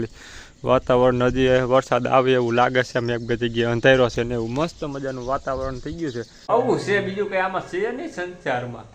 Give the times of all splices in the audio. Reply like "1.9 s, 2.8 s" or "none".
6.4 s